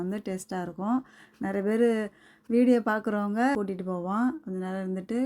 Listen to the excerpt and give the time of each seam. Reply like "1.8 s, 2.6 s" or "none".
3.6 s